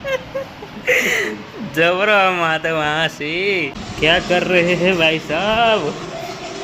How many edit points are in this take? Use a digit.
1